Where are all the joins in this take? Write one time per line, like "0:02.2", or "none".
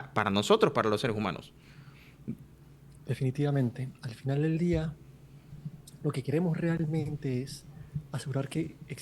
none